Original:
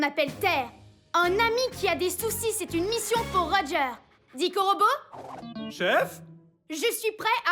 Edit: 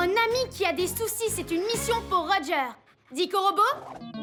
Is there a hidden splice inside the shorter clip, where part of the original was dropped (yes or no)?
no